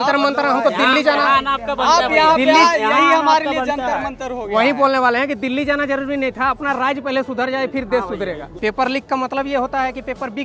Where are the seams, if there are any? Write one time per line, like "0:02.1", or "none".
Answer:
0:08.5